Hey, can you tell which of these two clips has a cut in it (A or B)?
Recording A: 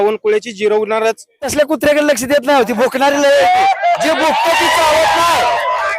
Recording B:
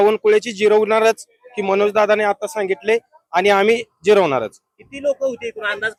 A